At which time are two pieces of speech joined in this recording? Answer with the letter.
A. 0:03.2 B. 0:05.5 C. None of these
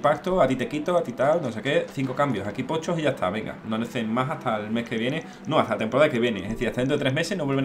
C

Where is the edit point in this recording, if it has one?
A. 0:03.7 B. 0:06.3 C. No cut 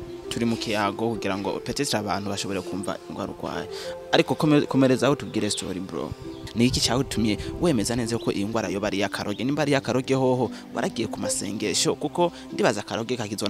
B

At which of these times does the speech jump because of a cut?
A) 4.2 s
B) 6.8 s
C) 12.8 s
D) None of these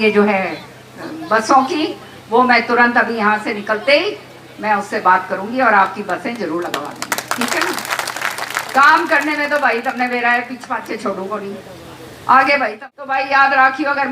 C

